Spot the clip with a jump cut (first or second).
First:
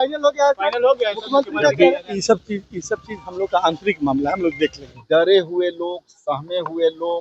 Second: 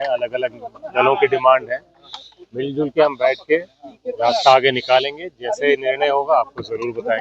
first